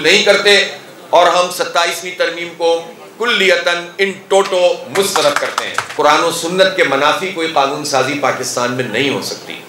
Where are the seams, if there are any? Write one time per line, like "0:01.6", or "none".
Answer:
0:05.9